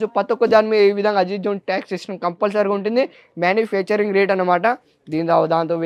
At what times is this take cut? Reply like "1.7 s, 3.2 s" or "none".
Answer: none

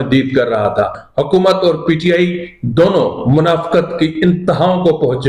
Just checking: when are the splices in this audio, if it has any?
1.0 s

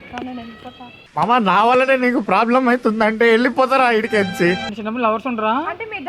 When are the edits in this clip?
4.6 s

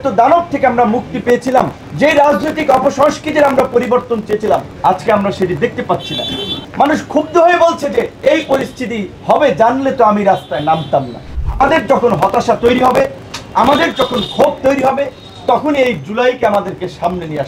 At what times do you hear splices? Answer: 1.8 s, 4.7 s, 6.6 s, 8.1 s, 9.1 s, 11.3 s

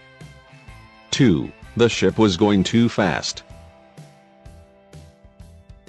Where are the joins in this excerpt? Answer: 3.1 s

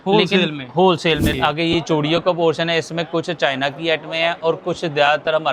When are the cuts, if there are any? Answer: 1.3 s

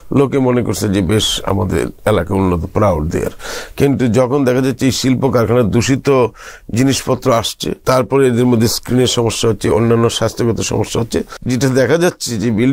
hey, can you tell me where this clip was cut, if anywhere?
7.8 s, 11.4 s

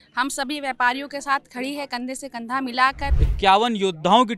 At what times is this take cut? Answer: 3.2 s

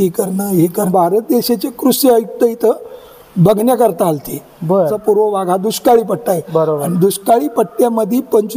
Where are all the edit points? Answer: 0.9 s, 5.0 s

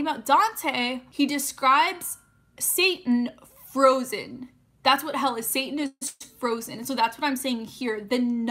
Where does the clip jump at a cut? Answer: 1.0 s

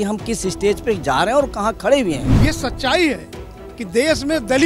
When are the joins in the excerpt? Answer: 2.3 s

